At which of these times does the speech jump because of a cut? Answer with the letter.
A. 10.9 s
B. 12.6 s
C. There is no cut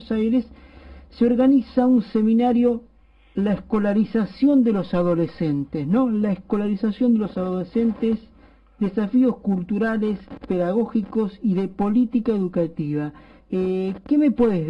C